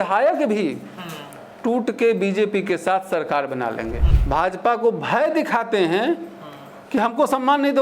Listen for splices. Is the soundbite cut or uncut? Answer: cut